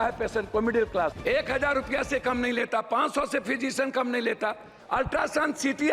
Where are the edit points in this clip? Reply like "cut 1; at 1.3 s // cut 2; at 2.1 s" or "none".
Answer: cut 1; at 1.2 s // cut 2; at 4.7 s